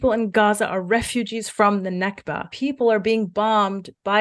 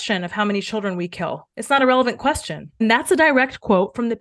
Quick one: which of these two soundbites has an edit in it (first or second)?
first